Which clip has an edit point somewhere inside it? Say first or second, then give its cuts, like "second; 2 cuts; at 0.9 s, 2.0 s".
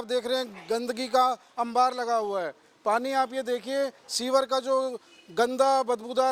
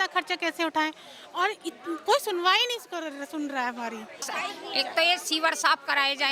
second; 1 cut; at 4.3 s